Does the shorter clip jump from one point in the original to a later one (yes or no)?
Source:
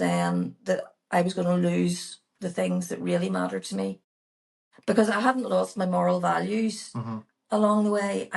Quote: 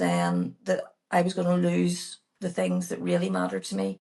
no